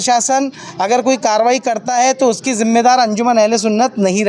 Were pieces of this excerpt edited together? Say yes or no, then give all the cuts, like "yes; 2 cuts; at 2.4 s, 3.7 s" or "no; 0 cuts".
no; 0 cuts